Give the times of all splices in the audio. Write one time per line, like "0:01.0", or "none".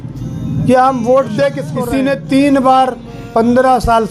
0:01.7